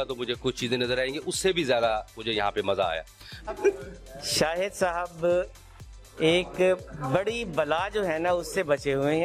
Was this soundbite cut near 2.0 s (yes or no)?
no